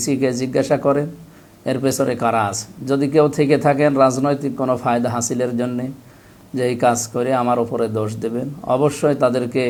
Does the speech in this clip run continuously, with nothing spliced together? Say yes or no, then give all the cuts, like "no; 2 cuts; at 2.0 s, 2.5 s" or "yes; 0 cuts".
yes; 0 cuts